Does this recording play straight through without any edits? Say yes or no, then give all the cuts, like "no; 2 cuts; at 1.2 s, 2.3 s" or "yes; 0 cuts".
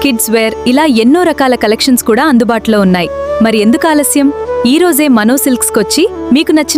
yes; 0 cuts